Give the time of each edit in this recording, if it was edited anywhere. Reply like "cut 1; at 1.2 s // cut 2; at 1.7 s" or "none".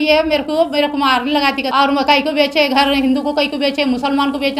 cut 1; at 1.7 s